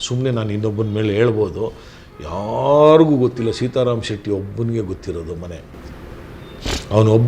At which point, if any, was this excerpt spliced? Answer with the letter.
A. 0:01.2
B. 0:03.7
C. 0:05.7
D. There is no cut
D